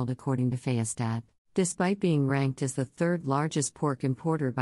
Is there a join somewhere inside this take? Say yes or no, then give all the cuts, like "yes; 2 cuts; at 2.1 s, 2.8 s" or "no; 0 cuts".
yes; 1 cut; at 1.3 s